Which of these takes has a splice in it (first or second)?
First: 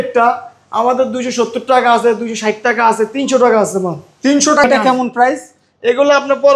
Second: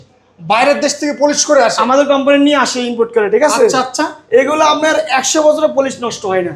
first